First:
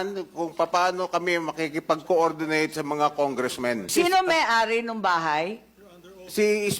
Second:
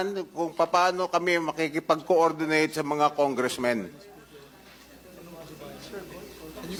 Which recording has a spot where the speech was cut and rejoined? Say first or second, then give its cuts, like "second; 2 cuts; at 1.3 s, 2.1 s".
first; 1 cut; at 3.9 s